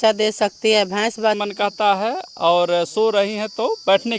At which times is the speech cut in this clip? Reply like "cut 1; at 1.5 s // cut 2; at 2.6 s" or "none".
cut 1; at 1.4 s